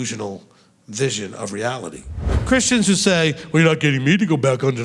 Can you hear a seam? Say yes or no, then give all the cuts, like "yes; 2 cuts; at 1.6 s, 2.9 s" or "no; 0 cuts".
yes; 1 cut; at 2.3 s